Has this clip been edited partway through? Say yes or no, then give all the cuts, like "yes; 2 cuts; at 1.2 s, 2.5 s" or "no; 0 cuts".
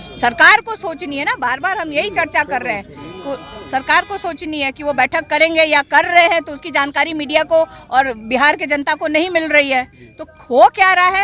no; 0 cuts